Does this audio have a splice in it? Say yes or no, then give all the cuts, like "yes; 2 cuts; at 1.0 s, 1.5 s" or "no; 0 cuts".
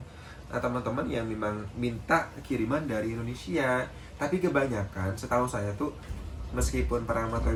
no; 0 cuts